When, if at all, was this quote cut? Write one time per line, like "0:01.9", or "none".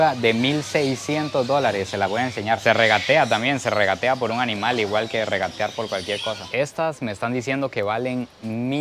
0:02.6
0:06.4